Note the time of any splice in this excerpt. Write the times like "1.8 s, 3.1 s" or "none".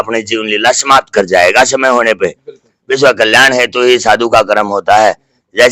2.7 s